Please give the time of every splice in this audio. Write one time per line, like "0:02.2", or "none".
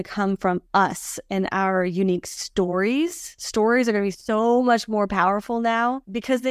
none